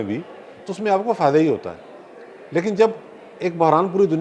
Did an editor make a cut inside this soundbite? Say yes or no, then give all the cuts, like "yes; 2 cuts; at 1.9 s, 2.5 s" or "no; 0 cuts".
no; 0 cuts